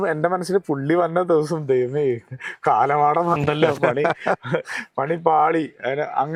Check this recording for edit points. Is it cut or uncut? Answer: uncut